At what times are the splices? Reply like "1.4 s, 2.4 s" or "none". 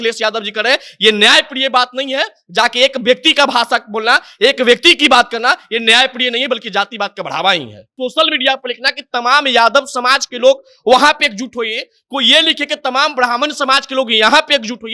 7.8 s